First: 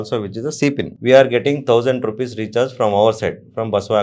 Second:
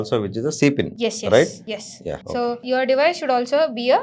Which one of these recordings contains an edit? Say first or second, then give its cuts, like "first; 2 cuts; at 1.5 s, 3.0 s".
first; 1 cut; at 0.9 s